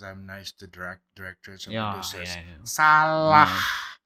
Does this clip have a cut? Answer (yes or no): no